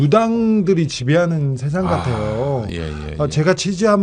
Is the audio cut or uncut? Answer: uncut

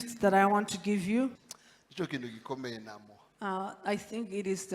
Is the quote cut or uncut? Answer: cut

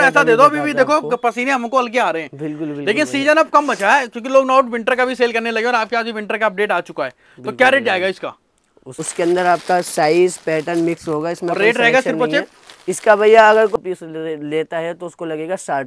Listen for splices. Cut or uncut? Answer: cut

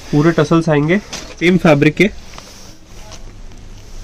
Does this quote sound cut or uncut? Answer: cut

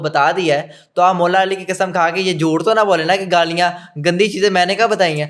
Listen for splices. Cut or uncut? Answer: uncut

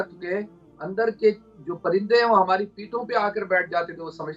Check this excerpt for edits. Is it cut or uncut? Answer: uncut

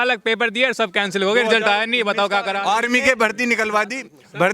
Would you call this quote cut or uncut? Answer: cut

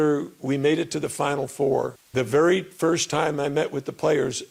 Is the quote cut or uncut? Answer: cut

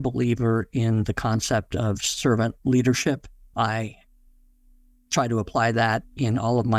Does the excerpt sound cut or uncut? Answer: cut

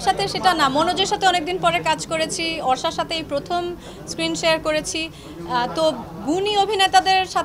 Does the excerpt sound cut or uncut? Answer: uncut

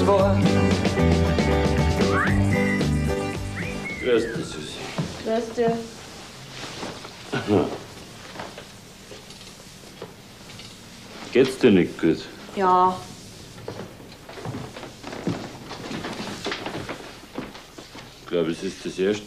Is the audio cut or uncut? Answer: cut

